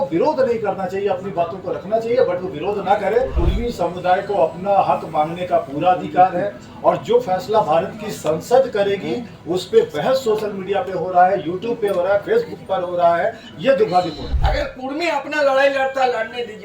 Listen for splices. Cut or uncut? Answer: cut